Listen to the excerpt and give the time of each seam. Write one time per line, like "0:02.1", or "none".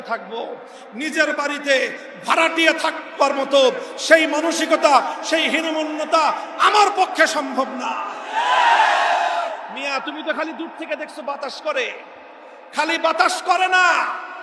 0:09.7